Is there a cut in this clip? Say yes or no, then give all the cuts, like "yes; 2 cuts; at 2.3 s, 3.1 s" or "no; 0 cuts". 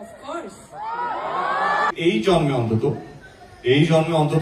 yes; 1 cut; at 1.9 s